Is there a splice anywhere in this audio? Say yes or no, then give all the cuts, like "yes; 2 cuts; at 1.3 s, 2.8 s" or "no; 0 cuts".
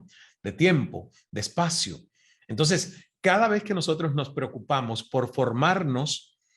no; 0 cuts